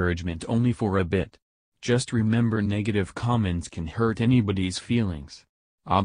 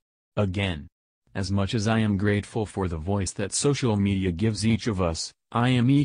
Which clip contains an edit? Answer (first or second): second